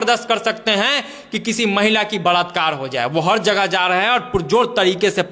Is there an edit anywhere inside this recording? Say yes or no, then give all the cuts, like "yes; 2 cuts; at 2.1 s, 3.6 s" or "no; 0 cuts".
no; 0 cuts